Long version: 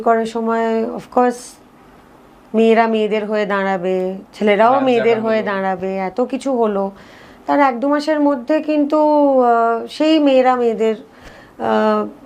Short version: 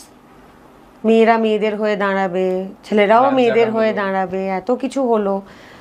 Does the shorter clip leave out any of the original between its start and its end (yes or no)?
no